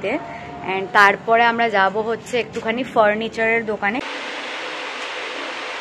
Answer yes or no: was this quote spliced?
yes